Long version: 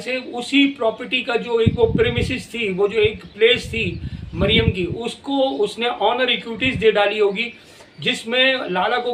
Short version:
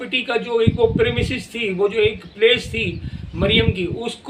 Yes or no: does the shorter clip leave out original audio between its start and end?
no